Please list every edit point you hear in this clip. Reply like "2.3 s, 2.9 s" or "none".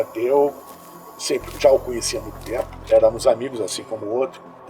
none

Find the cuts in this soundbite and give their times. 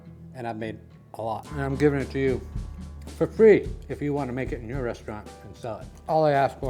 1.5 s

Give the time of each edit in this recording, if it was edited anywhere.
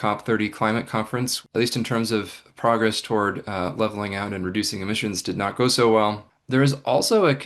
1.4 s, 6.3 s

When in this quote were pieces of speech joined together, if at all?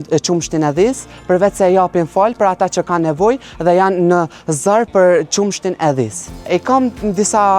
none

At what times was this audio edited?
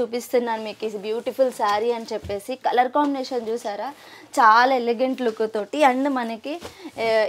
none

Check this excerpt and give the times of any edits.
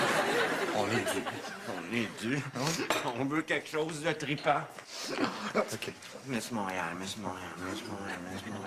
none

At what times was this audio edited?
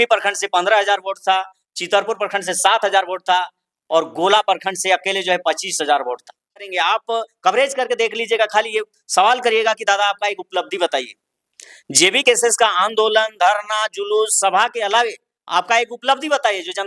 6.6 s

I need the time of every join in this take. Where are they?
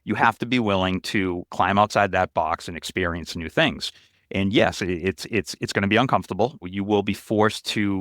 1.5 s, 6.6 s

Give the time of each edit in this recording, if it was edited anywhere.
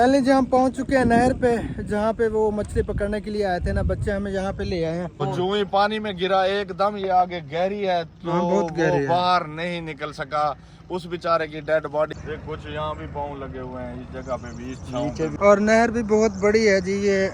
5.2 s, 12.2 s, 15.3 s

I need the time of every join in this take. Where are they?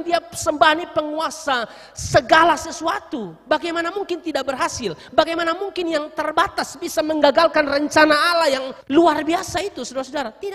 8.7 s

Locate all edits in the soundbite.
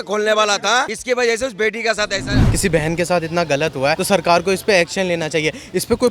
0.9 s, 2.4 s, 4.0 s

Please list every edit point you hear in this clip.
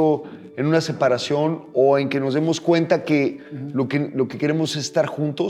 none

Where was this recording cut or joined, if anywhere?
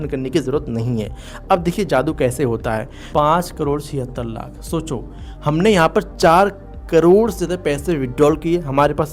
3.1 s

